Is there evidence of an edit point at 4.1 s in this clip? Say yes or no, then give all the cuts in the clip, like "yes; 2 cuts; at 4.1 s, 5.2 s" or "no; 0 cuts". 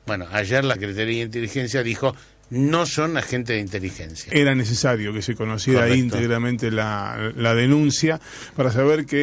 yes; 1 cut; at 4.1 s